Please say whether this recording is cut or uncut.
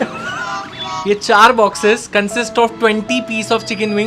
cut